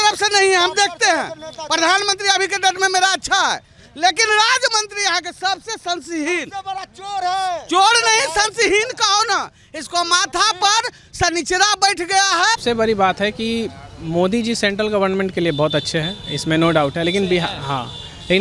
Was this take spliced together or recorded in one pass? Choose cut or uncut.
cut